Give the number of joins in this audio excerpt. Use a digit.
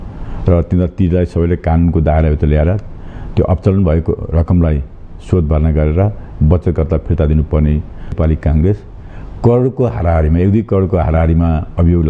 1